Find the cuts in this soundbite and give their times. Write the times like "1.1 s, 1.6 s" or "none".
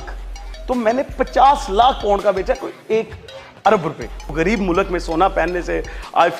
4.3 s